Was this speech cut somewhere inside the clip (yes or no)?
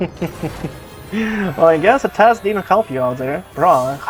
no